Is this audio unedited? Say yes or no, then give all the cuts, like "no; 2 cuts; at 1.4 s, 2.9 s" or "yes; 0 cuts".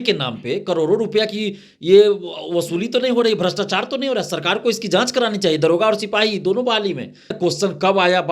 no; 1 cut; at 7.3 s